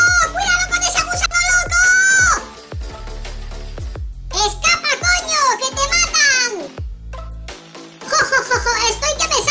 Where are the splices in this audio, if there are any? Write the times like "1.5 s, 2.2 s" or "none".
2.4 s, 4.3 s, 6.7 s, 8.1 s